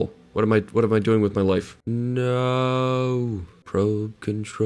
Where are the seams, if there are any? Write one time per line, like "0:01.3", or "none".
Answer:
0:01.8
0:03.5